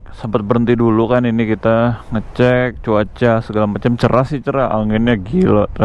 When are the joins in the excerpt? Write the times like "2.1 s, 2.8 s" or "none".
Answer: none